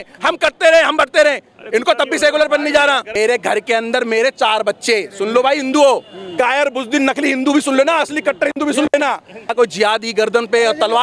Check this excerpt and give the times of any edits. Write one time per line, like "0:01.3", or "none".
0:03.2
0:09.5

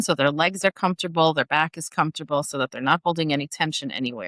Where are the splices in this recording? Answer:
none

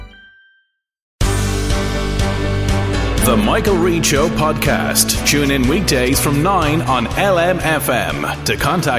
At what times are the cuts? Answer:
0:01.0

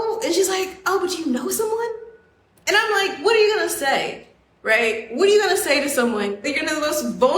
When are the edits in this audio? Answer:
0:06.5

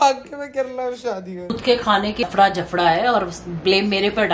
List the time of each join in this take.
0:01.4
0:02.3

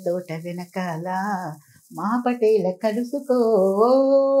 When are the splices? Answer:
none

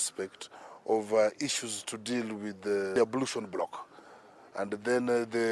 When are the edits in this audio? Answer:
0:02.9

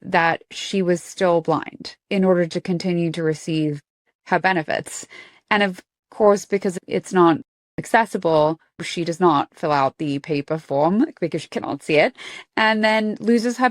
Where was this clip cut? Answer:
none

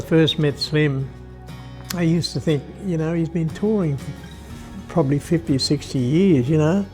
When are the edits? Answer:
none

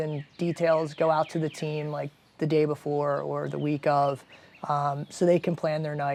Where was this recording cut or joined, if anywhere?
none

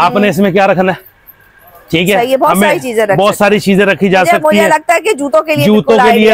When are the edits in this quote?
none

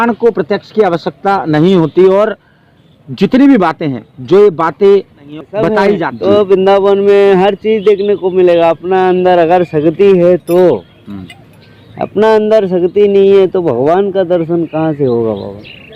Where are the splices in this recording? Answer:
0:06.1

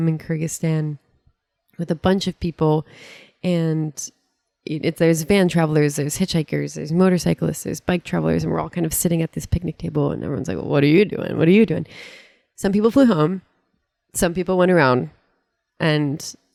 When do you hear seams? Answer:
none

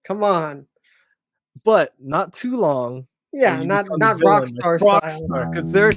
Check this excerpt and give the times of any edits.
none

